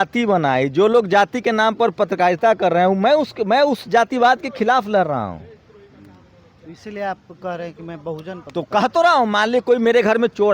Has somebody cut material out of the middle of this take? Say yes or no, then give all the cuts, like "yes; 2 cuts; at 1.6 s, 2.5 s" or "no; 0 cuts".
no; 0 cuts